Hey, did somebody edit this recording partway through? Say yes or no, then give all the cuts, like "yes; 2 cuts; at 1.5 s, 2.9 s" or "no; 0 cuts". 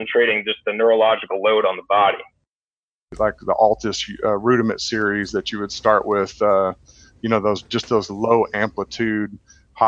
yes; 1 cut; at 2.7 s